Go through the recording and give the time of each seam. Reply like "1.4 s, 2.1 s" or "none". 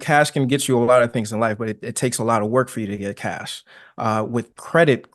none